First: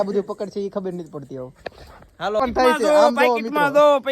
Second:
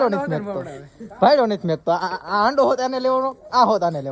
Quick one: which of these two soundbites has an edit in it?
first; 1 cut; at 2.4 s

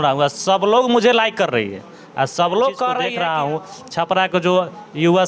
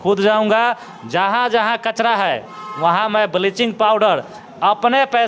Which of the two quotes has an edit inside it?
first; 1 cut; at 3.1 s

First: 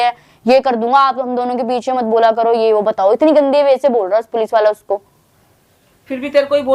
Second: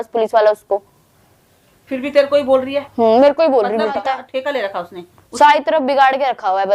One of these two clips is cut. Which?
second; 1 cut; at 4.0 s

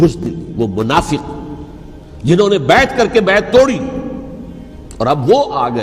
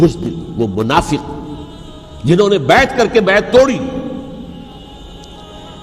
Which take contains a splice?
second; 1 cut; at 4.8 s

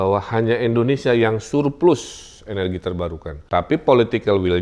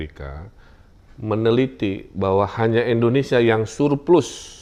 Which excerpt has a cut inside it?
first; 1 cut; at 3.5 s

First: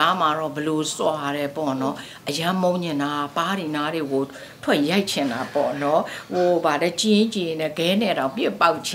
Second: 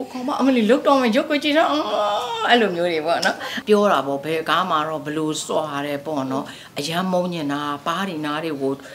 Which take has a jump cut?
second; 1 cut; at 3.5 s

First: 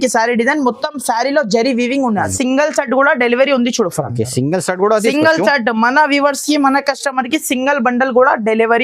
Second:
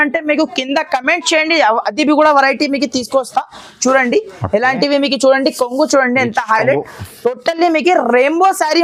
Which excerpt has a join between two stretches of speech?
first; 1 cut; at 2.3 s

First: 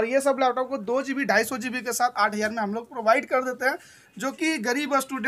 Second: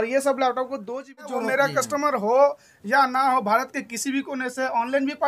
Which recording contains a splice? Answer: second; 1 cut; at 1.3 s

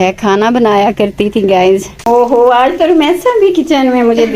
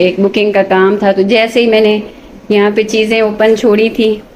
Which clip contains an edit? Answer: first; 1 cut; at 1.9 s

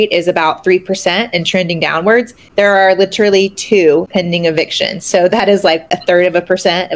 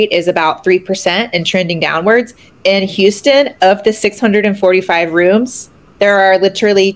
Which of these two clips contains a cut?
first; 3 cuts; at 2.4 s, 4.1 s, 5.9 s

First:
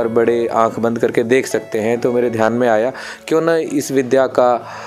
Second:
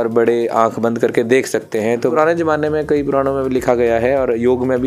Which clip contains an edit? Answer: second; 1 cut; at 2.1 s

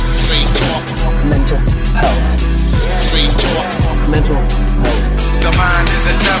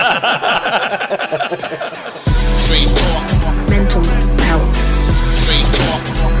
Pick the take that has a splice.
second; 1 cut; at 2.1 s

